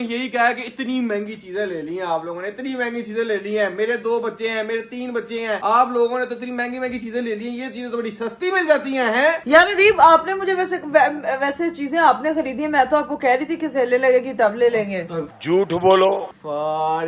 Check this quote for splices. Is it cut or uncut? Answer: uncut